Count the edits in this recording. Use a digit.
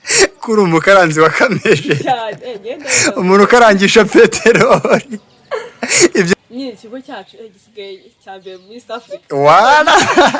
1